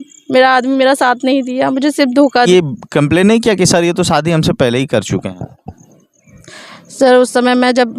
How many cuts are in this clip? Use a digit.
1